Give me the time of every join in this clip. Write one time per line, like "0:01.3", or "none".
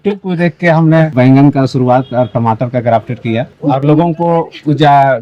0:01.1
0:03.6